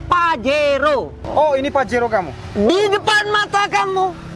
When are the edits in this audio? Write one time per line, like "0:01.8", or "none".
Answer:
0:01.2